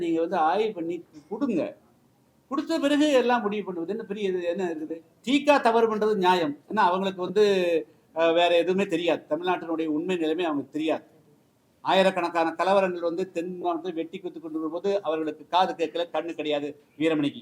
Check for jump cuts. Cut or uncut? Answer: cut